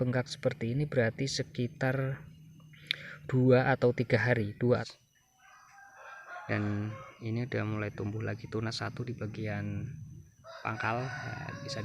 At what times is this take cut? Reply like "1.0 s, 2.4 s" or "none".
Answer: 4.8 s